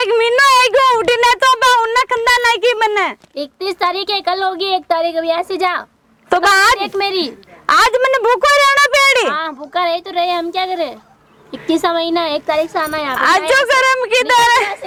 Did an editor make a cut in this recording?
no; 0 cuts

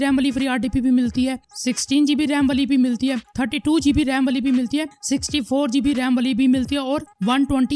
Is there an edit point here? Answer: no; 0 cuts

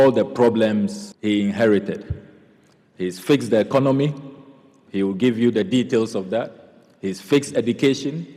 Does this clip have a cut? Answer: yes; 1 cut; at 1.1 s

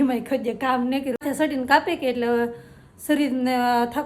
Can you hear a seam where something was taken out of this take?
yes; 1 cut; at 1.2 s

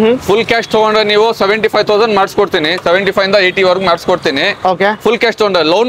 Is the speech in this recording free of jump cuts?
yes; 0 cuts

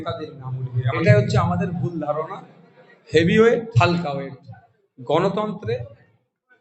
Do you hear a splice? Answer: yes; 2 cuts; at 0.9 s, 3.7 s

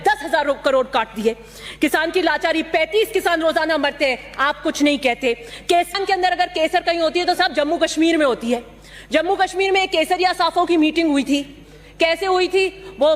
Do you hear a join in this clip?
yes; 1 cut; at 5.9 s

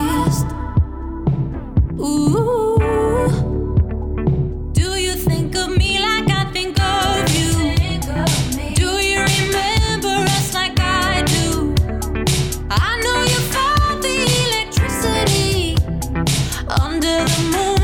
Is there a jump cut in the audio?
no; 0 cuts

